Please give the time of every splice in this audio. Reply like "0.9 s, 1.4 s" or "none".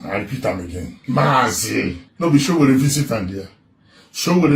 0.9 s, 2.0 s